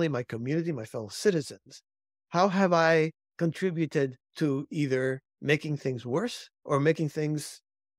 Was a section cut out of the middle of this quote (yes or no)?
yes